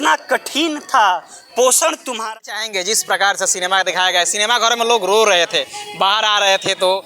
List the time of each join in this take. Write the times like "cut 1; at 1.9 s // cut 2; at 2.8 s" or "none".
cut 1; at 2.2 s